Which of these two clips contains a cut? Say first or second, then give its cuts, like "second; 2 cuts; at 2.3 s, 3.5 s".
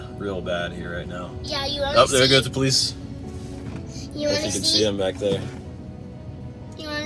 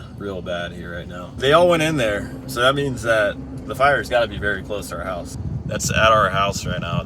second; 2 cuts; at 1.3 s, 5.3 s